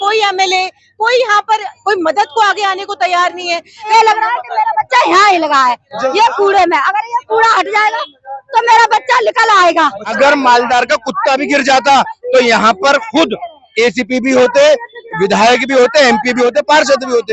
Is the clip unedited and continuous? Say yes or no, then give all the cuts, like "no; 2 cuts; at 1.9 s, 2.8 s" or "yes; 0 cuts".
no; 2 cuts; at 3.9 s, 10.1 s